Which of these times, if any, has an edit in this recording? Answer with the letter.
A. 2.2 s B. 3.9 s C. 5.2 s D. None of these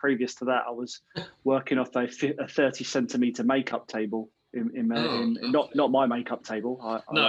D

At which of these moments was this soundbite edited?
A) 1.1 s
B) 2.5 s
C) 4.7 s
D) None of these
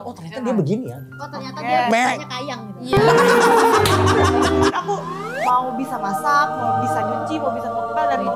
C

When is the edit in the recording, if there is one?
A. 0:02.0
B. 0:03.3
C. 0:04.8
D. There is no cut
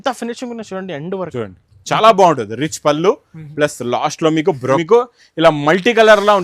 C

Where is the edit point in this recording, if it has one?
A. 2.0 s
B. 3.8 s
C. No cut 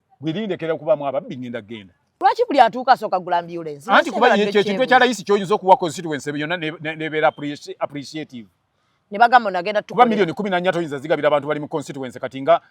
A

